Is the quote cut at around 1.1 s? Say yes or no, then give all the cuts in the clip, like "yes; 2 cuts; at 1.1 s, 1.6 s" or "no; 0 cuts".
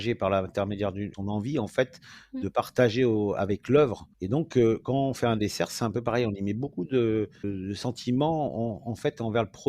yes; 3 cuts; at 1.1 s, 4.1 s, 7.5 s